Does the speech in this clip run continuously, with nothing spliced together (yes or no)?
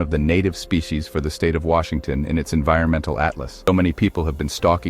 no